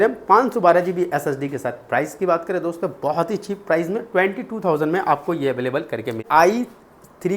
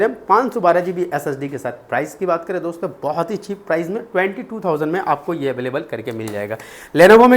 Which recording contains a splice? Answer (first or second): first